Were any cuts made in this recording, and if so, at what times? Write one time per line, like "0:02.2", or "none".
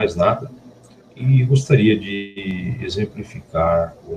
0:02.9